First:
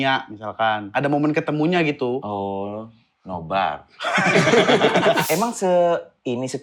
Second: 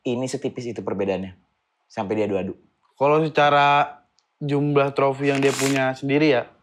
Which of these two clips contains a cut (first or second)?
first